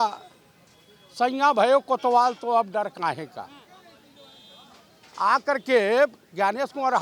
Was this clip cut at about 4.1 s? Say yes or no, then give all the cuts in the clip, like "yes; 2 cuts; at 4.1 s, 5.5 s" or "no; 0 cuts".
no; 0 cuts